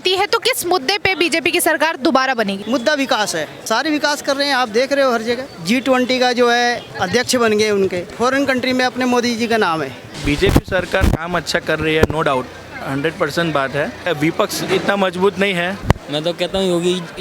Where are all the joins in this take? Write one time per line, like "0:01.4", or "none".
0:02.6
0:03.5
0:05.5
0:06.9
0:08.1
0:10.2
0:14.1
0:15.8